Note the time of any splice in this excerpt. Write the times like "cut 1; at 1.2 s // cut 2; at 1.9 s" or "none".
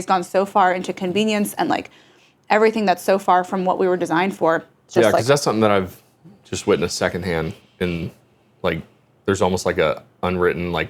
cut 1; at 4.9 s

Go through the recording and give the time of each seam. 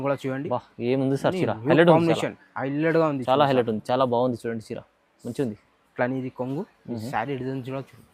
none

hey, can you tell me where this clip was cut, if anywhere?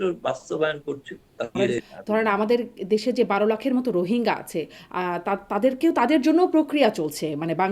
cut 1; at 1.5 s

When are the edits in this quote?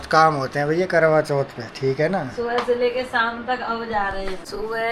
none

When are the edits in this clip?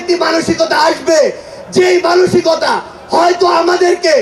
none

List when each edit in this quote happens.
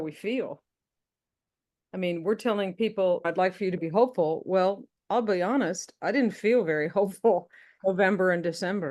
none

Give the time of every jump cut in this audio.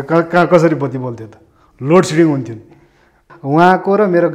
cut 1; at 3.3 s

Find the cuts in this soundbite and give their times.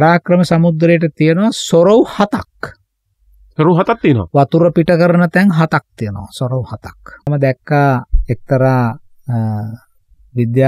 cut 1; at 7.3 s

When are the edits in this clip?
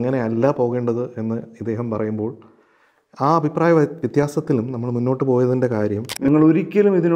cut 1; at 6.1 s

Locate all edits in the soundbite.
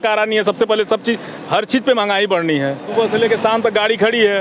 cut 1; at 2.9 s

